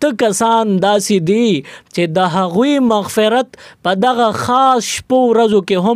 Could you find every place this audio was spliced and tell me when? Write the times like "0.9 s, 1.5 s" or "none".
none